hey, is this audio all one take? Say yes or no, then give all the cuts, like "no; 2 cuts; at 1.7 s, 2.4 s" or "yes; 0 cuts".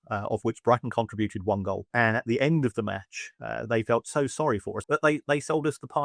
no; 2 cuts; at 1.9 s, 4.7 s